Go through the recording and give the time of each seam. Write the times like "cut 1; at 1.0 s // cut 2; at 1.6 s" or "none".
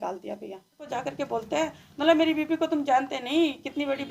cut 1; at 0.9 s

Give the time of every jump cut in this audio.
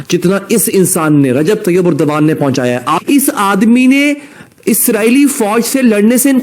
cut 1; at 3.0 s

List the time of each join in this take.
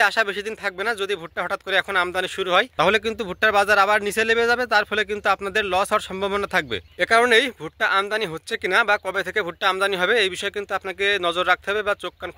cut 1; at 2.7 s // cut 2; at 6.8 s

